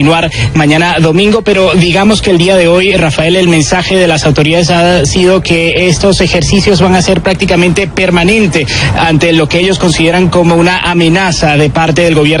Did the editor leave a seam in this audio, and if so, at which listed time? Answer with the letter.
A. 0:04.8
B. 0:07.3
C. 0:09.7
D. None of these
B